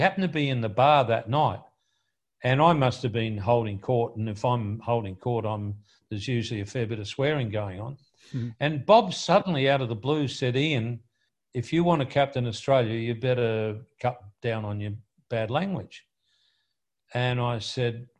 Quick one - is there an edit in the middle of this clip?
no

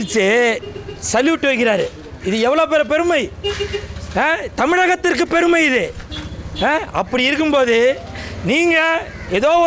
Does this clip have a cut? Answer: no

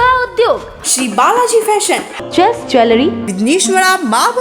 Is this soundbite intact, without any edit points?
yes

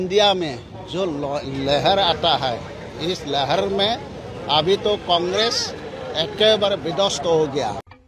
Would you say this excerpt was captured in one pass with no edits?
yes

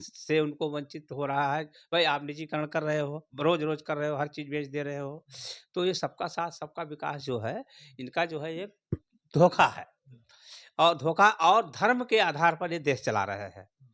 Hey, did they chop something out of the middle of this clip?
no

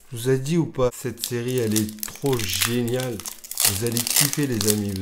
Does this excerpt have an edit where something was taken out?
yes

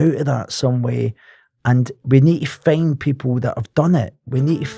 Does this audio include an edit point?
no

